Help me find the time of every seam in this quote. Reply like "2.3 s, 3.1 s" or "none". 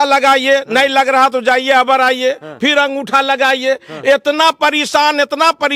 none